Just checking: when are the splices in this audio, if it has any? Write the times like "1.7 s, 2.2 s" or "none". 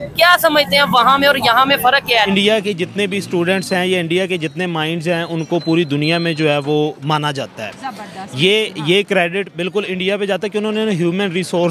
2.3 s